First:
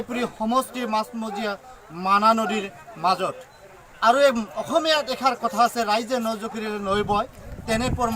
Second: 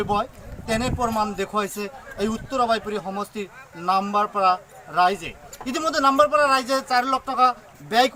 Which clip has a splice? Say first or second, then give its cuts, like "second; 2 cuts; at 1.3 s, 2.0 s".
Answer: first; 1 cut; at 1.2 s